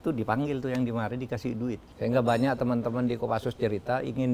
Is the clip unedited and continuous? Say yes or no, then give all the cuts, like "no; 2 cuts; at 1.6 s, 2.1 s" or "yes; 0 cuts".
no; 1 cut; at 1.9 s